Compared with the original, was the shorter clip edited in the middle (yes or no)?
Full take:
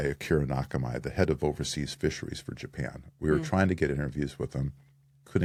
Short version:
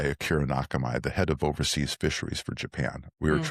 no